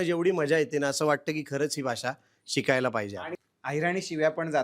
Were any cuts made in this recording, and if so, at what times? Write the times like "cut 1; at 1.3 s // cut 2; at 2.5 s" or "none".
cut 1; at 3.3 s